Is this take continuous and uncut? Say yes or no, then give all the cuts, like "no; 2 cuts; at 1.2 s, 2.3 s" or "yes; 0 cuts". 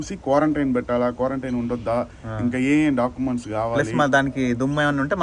yes; 0 cuts